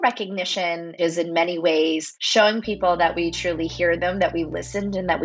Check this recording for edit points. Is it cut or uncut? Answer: cut